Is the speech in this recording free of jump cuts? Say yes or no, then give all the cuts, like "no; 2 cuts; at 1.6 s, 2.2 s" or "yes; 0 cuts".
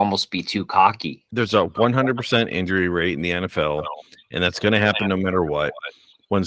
yes; 0 cuts